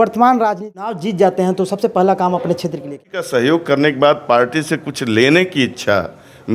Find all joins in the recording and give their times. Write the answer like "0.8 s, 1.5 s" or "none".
1.0 s, 2.9 s